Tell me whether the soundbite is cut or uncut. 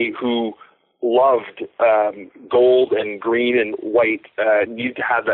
uncut